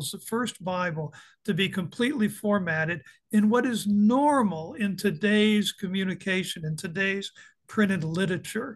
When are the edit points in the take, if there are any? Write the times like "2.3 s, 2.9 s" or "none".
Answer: none